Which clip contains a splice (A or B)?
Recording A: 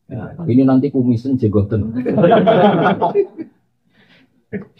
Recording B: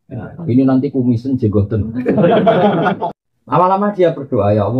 B